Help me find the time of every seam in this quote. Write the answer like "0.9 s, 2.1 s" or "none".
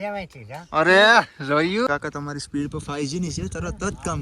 1.9 s